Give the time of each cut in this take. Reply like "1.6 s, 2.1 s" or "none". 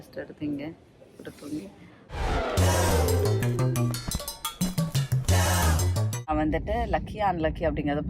6.3 s